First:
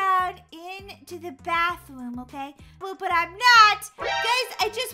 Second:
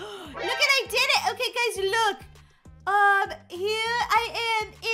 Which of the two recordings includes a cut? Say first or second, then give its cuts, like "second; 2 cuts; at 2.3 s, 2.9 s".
first; 1 cut; at 2.8 s